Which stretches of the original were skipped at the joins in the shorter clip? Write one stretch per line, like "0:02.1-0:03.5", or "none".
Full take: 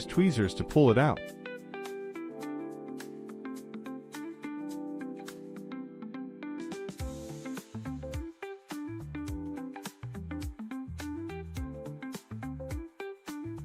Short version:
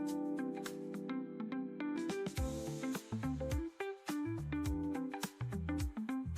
none